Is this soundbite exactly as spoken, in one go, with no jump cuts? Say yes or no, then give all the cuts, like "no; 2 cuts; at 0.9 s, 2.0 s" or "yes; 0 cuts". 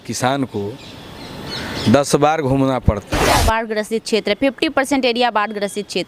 no; 1 cut; at 3.3 s